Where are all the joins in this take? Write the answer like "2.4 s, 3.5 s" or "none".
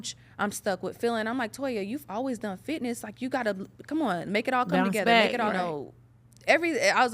5.5 s